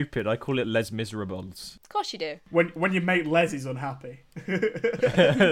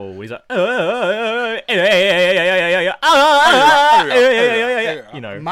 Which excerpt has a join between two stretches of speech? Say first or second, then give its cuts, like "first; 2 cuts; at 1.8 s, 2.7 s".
first; 1 cut; at 2.1 s